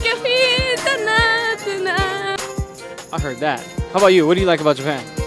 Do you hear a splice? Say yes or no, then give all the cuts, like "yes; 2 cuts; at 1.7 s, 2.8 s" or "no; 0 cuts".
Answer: no; 0 cuts